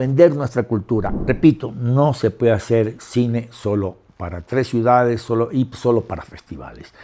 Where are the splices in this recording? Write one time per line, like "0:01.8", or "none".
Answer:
0:01.1